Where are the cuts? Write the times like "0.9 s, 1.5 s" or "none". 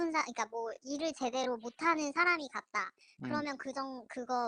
none